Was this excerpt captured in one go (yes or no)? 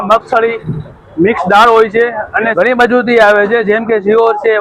no